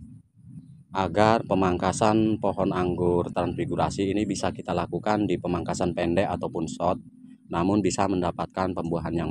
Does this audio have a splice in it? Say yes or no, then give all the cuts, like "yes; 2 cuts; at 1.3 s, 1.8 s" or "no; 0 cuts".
no; 0 cuts